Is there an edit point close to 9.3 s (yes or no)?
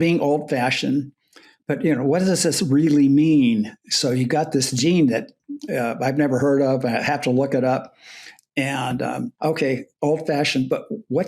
yes